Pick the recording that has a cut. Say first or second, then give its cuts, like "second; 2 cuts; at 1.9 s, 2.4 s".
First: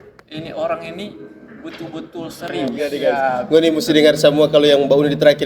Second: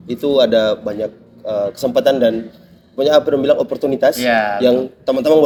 first; 1 cut; at 2.8 s